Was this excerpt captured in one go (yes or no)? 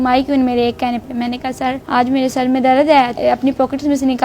no